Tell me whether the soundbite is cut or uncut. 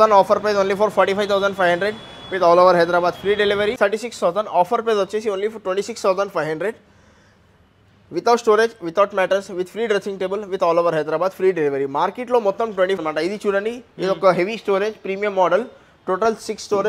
cut